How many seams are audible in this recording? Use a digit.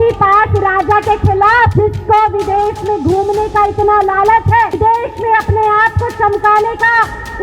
2